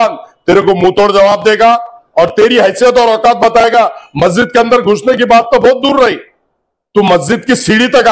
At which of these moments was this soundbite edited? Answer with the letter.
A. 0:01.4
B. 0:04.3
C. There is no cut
C